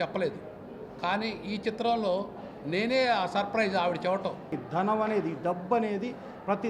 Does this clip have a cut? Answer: yes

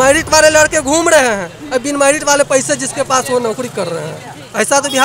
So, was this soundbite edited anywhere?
no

